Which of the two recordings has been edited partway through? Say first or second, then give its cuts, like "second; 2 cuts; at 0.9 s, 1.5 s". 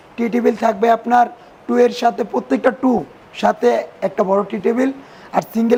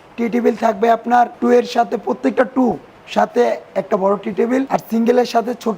second; 2 cuts; at 1.3 s, 4.7 s